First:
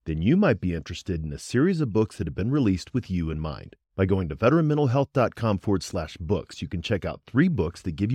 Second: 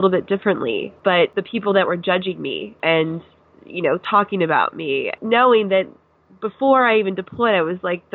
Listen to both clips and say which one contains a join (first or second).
second